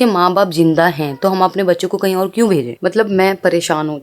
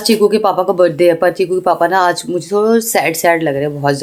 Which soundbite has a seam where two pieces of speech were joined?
first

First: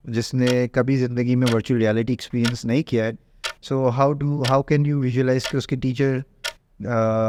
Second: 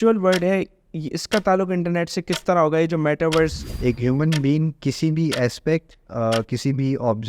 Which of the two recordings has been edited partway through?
second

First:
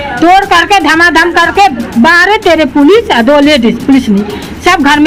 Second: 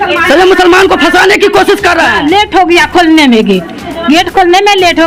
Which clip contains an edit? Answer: second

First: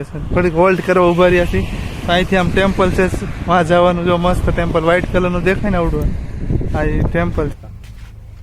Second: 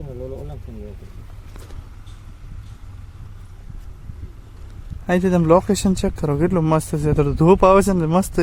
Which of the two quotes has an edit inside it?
first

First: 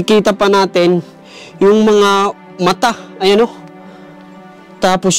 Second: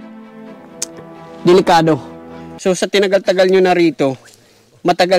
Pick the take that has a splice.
second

